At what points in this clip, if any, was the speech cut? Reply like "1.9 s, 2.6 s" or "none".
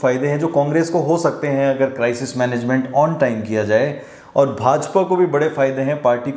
none